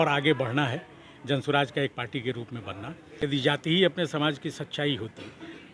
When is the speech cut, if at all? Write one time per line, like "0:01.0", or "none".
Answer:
0:03.0